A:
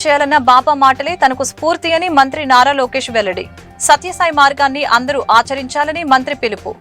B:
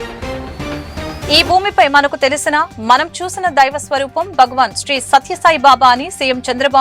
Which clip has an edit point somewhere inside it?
B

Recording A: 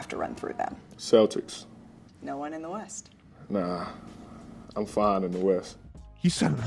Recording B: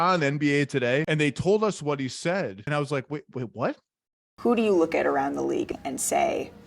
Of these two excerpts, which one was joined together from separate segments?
B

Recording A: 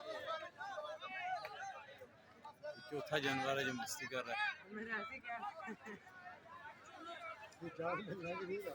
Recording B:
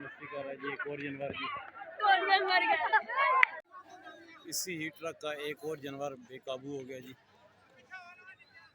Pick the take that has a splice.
B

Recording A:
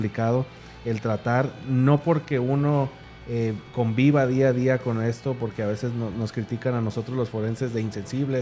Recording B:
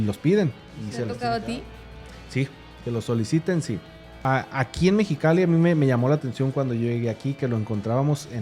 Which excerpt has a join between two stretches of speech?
B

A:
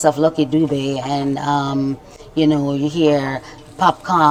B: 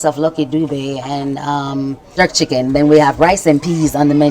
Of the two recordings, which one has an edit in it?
B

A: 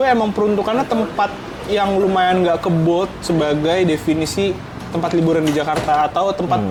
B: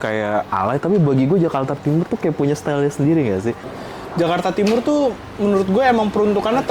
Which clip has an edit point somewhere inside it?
B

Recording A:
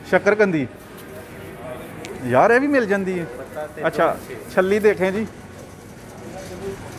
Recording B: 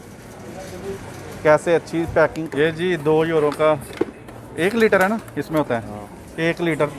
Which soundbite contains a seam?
B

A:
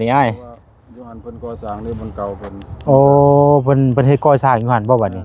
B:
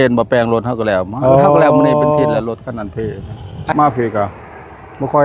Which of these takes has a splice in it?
B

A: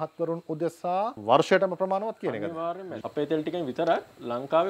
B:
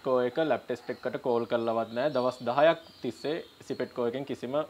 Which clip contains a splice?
A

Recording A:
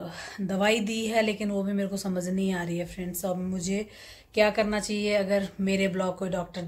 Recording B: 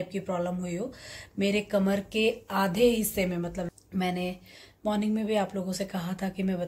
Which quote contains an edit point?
B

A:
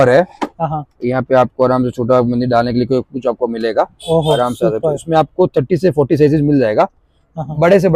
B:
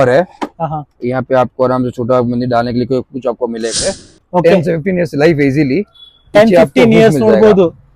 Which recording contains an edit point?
B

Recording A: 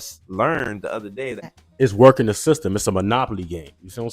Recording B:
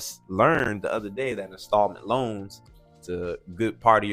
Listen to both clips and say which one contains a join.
A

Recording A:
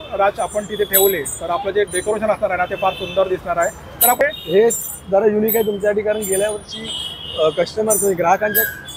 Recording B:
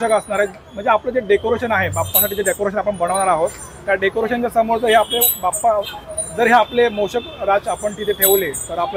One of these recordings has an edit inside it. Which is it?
A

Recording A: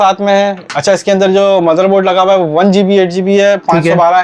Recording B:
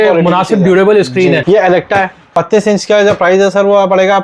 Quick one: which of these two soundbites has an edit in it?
B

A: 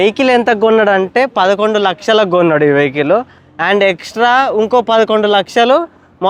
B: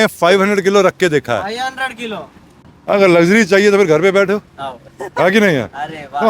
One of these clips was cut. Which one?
B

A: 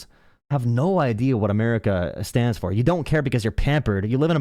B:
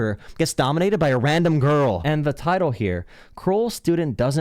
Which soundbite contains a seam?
B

